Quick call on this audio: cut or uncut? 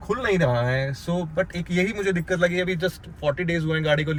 uncut